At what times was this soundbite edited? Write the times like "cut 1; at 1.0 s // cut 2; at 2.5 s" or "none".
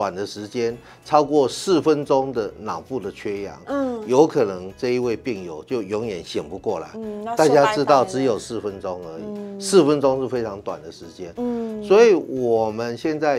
none

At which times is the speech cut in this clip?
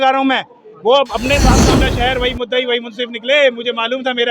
cut 1; at 1.6 s

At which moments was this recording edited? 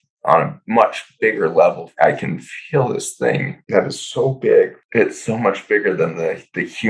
cut 1; at 1.9 s // cut 2; at 3.5 s // cut 3; at 4.8 s

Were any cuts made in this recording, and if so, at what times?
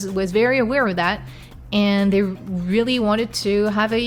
none

